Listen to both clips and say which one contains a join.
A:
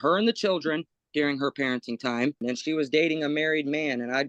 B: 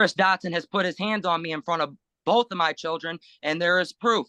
A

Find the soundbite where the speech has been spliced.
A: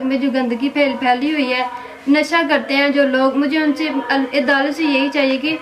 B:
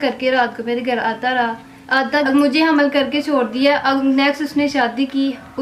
B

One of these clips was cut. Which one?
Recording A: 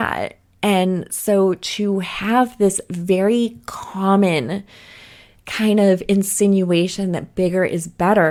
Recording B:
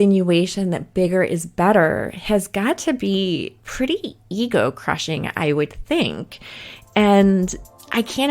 B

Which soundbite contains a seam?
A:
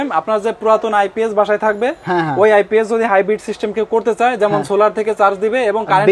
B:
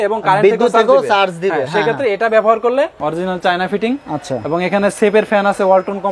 B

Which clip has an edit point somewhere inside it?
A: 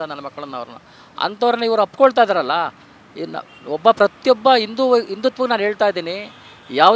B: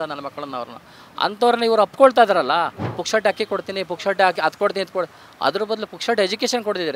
B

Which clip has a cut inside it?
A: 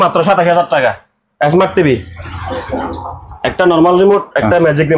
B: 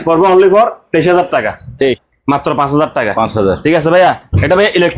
B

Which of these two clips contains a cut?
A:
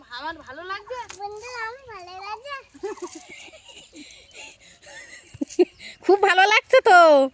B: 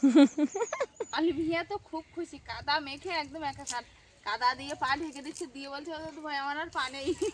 B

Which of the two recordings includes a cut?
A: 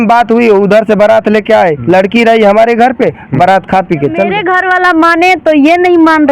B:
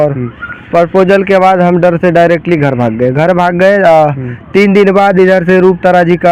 A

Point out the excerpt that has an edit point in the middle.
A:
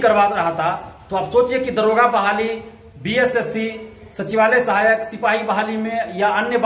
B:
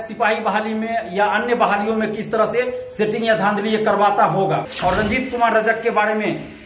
B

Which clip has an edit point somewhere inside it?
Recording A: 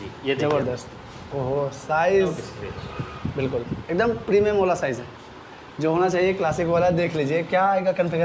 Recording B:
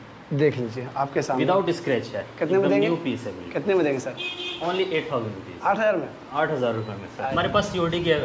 B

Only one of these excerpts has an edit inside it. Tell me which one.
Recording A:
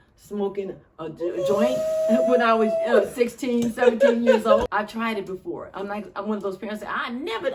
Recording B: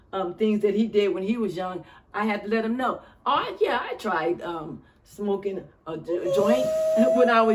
A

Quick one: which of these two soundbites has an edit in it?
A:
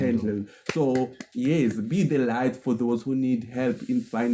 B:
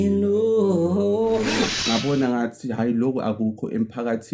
B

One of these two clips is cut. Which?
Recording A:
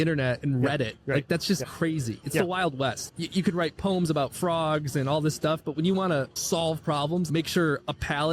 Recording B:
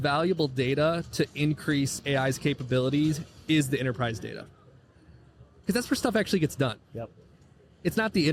A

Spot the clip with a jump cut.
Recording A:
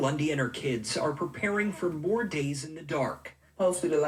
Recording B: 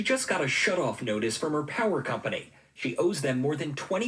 B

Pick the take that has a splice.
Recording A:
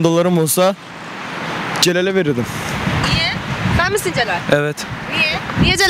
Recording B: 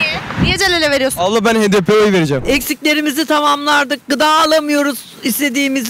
B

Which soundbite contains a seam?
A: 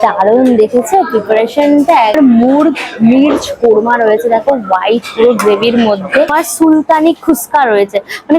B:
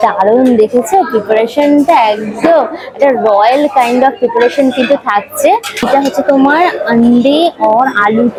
A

